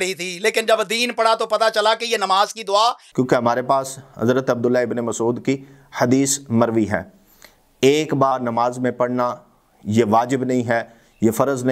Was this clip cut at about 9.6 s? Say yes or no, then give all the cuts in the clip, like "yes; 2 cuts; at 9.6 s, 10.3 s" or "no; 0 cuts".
no; 2 cuts; at 3.0 s, 8.3 s